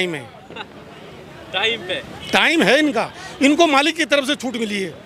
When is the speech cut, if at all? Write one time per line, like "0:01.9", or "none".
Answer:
none